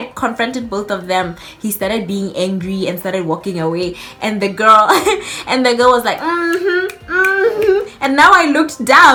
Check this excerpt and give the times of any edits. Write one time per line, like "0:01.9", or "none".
none